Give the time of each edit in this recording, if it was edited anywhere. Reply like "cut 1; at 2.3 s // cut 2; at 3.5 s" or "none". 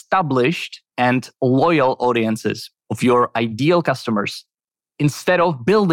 none